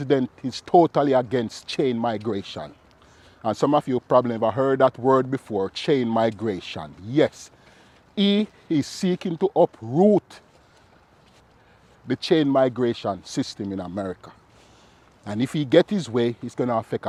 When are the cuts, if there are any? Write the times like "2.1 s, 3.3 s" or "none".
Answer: none

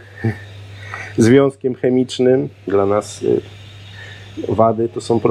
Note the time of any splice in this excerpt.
2.7 s

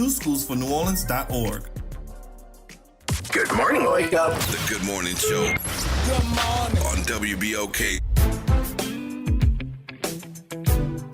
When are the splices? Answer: 3.0 s

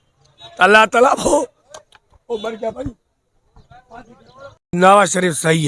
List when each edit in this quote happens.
4.8 s

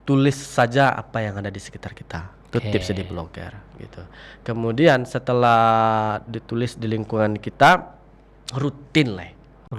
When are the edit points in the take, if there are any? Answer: none

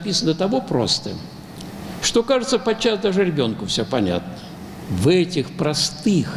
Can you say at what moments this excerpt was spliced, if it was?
4.8 s

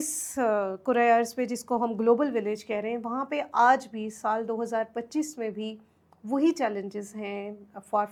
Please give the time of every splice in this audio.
none

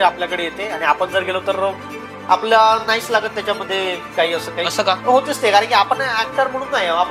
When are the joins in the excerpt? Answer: 5.0 s

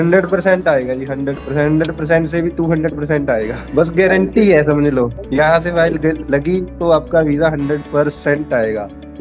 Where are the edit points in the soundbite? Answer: 3.6 s, 5.2 s

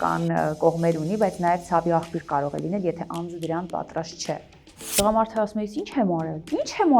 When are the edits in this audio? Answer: 4.9 s

